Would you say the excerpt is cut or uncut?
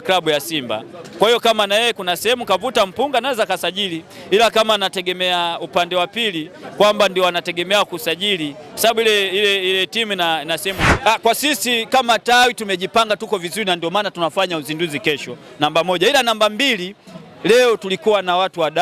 cut